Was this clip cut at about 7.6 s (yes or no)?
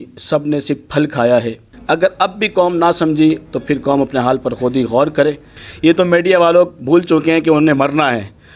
no